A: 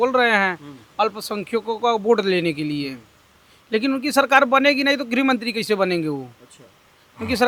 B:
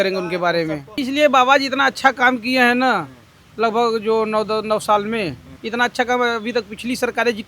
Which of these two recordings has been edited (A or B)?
B